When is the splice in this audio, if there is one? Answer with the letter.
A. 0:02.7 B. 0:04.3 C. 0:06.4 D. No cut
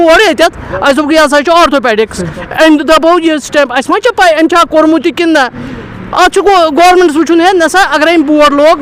D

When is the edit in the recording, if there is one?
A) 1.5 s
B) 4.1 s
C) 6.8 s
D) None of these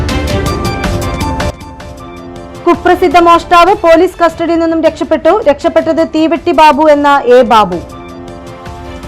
A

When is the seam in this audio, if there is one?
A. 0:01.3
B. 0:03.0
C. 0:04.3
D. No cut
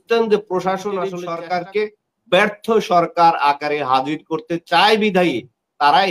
A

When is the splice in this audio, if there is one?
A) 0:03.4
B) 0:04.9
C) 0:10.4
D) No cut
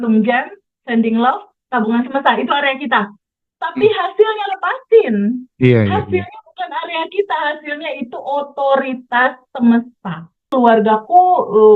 C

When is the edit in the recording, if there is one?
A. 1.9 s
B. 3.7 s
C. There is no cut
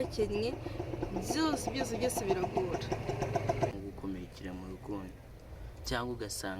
B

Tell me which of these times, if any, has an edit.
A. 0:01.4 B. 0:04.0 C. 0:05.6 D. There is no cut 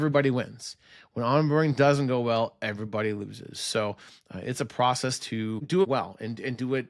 D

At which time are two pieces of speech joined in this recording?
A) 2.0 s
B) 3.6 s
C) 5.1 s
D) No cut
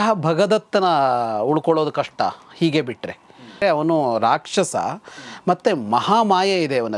B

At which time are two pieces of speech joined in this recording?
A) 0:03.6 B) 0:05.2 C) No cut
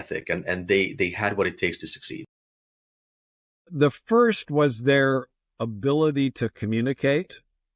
C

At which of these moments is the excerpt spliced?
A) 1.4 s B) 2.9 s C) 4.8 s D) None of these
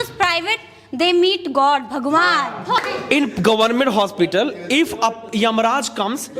B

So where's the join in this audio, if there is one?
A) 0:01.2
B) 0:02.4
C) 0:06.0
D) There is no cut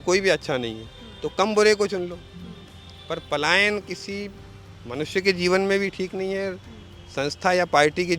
D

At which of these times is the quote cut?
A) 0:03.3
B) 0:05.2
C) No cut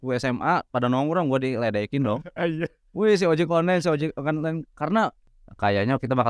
B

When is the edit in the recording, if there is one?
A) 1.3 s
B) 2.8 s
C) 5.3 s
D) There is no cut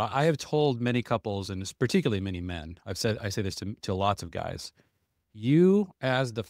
D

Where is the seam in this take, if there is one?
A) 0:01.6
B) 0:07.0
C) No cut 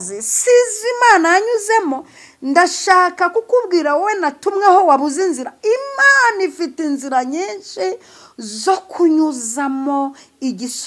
C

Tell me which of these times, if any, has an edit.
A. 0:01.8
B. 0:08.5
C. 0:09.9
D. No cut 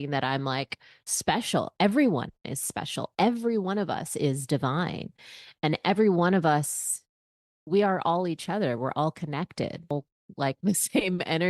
C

